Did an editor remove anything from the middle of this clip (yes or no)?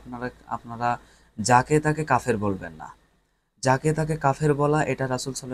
no